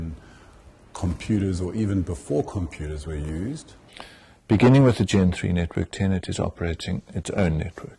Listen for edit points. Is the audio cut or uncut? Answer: cut